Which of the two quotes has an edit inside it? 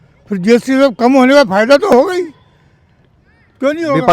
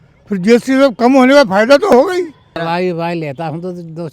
second; 1 cut; at 2.6 s

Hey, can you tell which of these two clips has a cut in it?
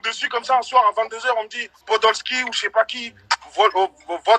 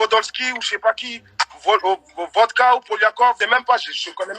second; 1 cut; at 3.4 s

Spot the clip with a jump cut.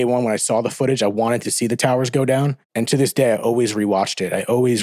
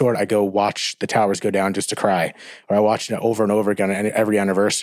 first; 2 cuts; at 1.1 s, 2.6 s

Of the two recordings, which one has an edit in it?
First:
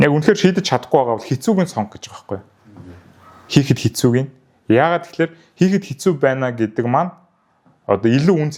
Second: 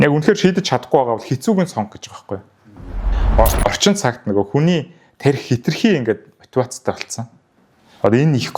second; 1 cut; at 3.2 s

